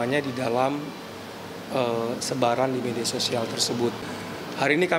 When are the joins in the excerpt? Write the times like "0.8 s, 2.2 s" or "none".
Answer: 4.0 s